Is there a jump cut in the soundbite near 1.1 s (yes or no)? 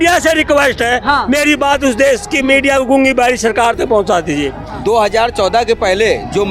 no